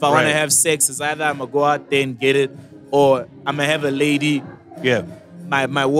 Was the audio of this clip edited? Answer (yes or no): no